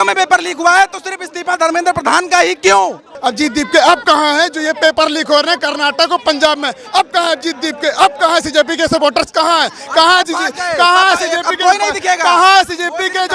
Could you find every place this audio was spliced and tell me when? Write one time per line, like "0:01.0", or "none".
0:03.1